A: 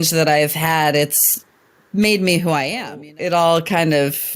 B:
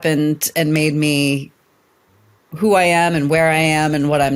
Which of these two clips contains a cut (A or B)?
A